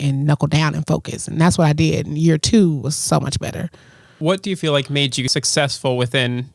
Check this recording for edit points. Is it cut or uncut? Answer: cut